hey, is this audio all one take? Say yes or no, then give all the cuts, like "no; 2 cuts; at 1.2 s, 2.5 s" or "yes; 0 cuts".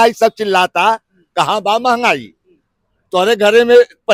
yes; 0 cuts